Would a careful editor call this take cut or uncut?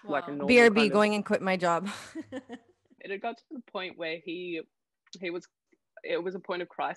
cut